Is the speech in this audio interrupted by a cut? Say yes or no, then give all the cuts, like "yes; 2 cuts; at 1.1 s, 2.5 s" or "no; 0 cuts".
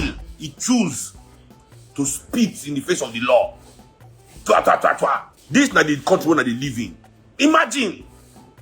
no; 0 cuts